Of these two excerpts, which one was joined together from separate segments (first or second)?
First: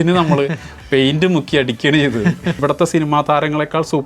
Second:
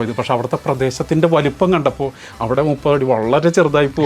first